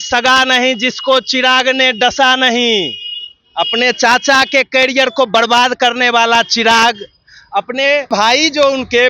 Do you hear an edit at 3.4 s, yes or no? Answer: no